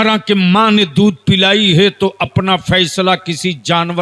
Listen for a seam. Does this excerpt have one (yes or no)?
no